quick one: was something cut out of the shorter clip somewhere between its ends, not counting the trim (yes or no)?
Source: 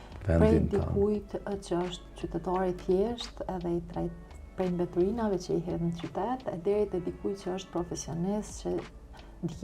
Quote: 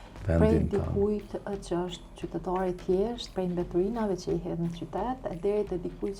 yes